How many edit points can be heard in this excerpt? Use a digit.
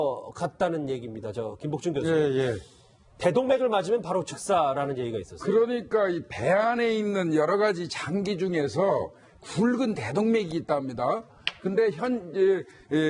1